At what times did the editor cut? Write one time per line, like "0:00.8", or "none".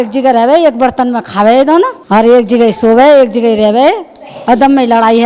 0:02.0